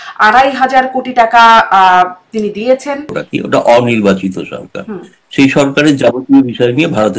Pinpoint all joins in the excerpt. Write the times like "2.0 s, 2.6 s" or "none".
3.2 s